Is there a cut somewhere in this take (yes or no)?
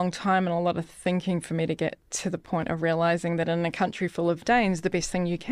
no